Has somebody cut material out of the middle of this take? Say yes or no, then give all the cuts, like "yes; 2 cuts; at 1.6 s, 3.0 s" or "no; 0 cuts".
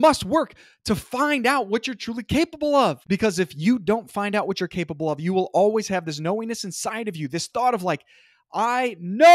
yes; 1 cut; at 3.0 s